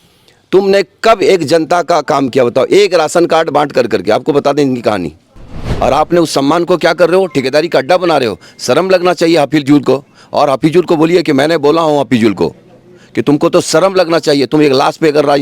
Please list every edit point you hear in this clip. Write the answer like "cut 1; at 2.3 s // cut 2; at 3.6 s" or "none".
cut 1; at 5.7 s